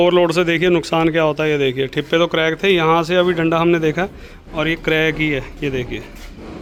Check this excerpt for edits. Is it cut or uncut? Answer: uncut